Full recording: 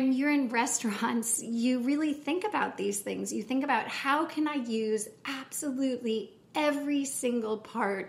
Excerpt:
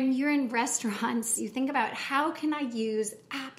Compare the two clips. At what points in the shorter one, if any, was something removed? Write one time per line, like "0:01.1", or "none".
0:01.4